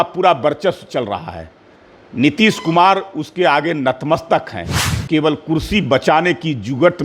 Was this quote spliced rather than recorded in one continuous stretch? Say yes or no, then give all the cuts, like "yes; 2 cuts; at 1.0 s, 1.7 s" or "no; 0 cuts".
no; 0 cuts